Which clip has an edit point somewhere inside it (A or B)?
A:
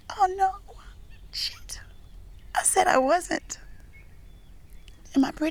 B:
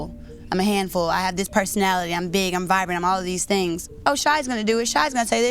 B